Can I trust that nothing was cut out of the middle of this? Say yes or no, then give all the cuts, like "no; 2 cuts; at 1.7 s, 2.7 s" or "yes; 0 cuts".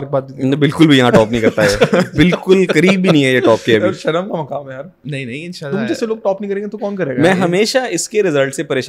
yes; 0 cuts